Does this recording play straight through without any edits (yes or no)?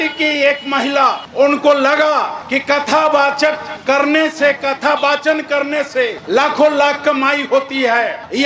yes